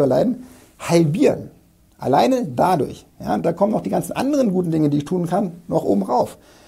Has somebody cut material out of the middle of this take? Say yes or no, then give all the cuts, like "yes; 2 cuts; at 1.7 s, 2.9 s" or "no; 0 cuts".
no; 0 cuts